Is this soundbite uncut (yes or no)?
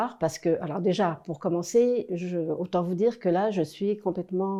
yes